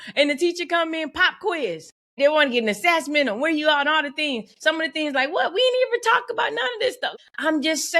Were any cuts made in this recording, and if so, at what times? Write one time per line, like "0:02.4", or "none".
0:02.2
0:07.1